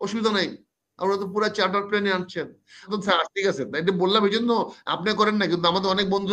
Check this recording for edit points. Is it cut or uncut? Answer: cut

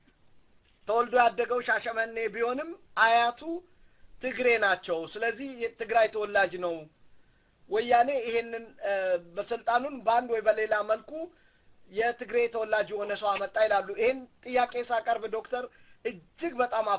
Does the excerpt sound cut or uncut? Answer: uncut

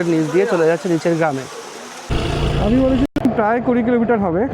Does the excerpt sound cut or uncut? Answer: cut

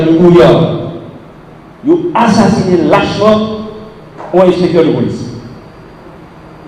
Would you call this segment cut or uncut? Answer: uncut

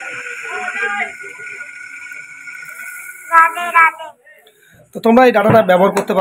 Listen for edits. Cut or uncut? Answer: uncut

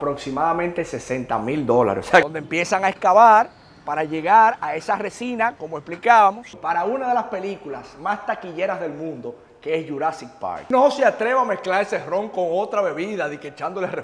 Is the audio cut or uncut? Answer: cut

